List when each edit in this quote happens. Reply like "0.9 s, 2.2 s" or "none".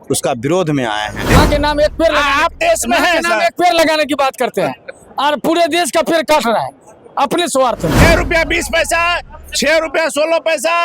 1.4 s, 8.0 s